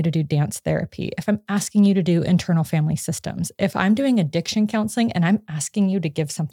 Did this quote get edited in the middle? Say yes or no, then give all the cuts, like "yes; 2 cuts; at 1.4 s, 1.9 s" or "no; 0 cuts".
no; 0 cuts